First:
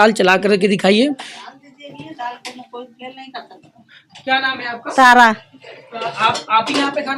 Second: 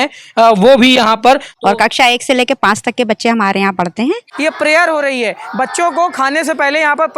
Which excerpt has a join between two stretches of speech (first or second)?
second